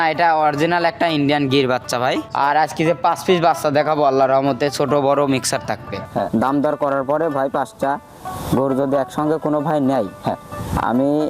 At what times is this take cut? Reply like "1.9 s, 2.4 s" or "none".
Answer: 2.3 s, 6.1 s